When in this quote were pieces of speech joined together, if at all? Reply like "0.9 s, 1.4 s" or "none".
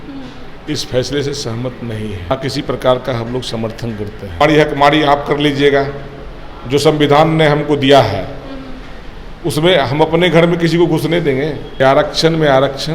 2.3 s, 4.4 s, 11.7 s